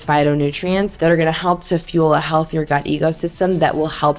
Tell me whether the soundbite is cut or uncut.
cut